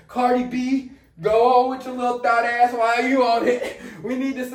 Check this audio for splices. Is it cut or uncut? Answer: uncut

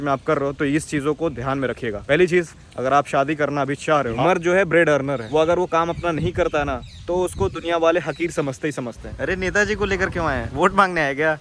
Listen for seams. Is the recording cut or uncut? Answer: cut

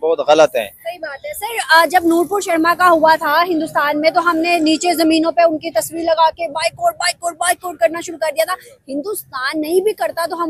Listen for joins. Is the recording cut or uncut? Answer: uncut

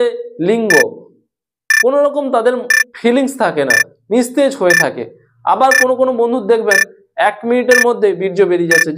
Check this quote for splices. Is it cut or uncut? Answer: uncut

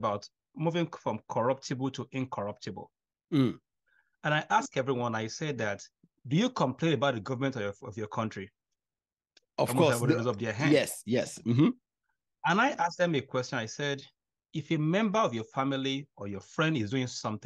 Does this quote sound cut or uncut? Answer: uncut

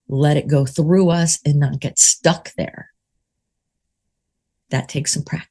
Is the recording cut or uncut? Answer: uncut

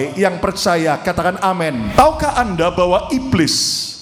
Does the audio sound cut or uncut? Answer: cut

